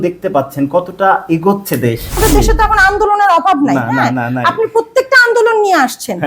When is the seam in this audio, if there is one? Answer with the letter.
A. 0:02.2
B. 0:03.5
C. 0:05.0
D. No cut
A